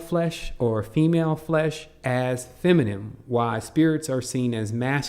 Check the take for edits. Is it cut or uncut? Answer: cut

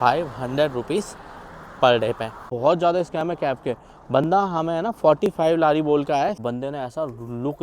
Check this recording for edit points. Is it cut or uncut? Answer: cut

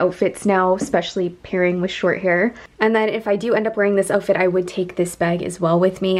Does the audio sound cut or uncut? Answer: uncut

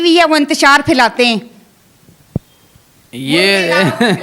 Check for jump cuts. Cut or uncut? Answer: uncut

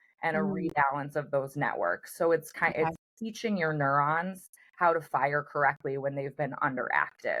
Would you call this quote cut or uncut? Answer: uncut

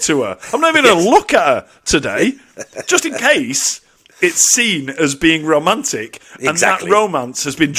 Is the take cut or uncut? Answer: uncut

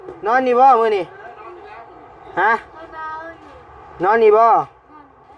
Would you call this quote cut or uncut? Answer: uncut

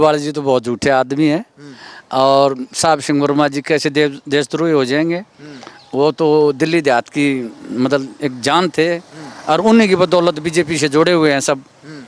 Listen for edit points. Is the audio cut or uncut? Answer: uncut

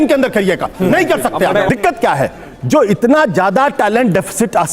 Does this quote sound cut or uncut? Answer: cut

